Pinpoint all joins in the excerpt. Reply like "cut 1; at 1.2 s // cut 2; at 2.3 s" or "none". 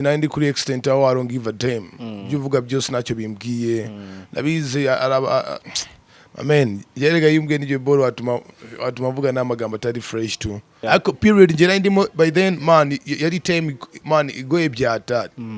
cut 1; at 10.8 s